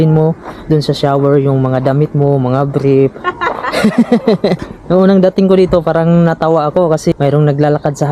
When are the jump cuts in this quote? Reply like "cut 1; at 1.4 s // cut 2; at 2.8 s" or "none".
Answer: cut 1; at 4.6 s // cut 2; at 7.1 s